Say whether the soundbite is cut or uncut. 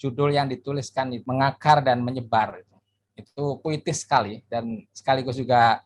cut